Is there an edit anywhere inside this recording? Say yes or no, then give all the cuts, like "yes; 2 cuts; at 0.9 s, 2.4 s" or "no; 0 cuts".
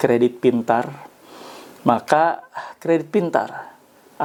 no; 0 cuts